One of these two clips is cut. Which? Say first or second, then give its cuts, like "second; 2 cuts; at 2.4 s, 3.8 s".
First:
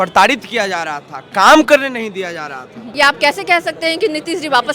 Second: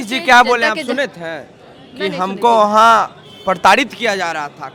first; 1 cut; at 2.9 s